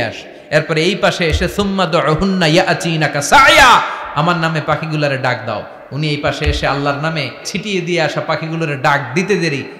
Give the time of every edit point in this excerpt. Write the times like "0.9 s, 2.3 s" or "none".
7.5 s